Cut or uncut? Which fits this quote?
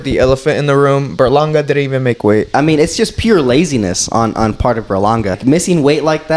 cut